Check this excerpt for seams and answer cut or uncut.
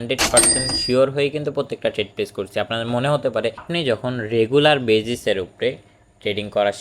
cut